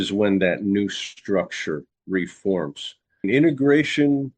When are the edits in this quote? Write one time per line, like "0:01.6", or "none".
0:03.2